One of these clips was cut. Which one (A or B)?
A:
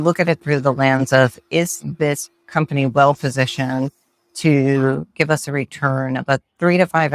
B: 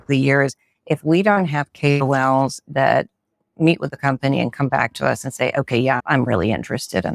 B